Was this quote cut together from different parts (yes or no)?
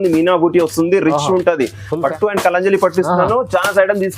yes